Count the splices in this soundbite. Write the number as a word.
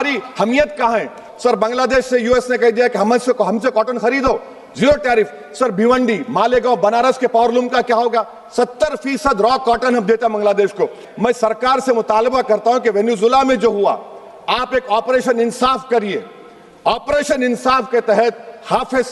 two